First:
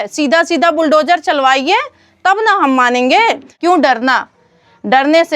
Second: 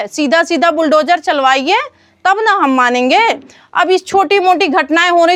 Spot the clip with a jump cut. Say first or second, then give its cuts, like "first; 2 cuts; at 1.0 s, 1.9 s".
first; 1 cut; at 3.5 s